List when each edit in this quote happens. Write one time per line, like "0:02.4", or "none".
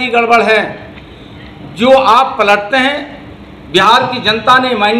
none